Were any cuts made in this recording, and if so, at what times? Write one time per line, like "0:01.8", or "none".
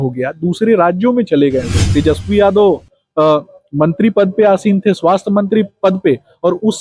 0:01.8